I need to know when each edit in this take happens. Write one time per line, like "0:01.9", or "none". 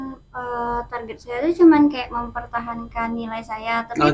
none